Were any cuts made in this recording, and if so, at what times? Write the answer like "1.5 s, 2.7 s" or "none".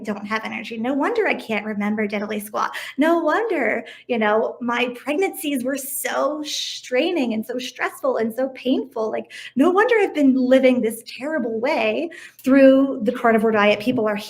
12.2 s